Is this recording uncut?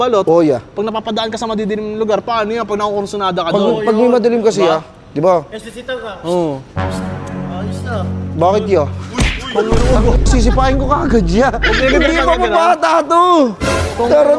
yes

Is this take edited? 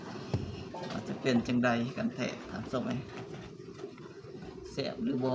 no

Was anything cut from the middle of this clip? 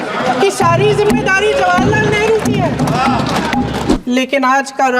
yes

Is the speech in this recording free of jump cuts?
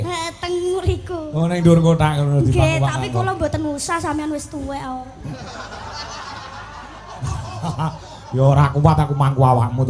yes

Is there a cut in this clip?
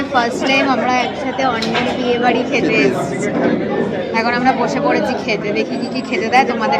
no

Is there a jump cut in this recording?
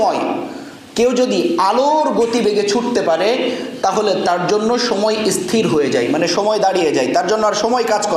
no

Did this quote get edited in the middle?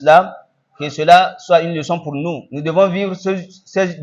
yes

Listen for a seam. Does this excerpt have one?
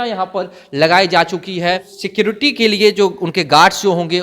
yes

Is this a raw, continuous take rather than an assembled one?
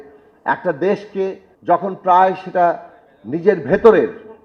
no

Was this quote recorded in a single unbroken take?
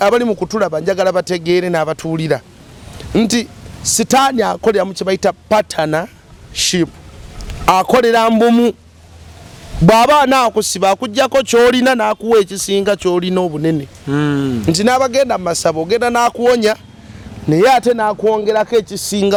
yes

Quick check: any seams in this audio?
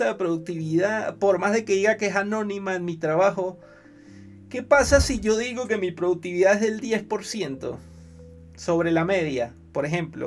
no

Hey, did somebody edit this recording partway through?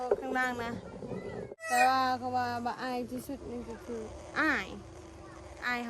yes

